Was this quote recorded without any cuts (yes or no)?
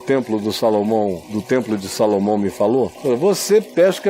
no